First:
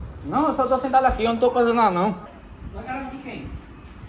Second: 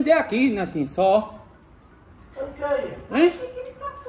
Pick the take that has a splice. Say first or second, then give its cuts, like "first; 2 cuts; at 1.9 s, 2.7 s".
first; 1 cut; at 2.3 s